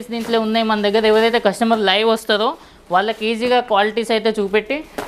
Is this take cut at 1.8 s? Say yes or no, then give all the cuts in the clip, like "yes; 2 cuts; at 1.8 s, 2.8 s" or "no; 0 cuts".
no; 0 cuts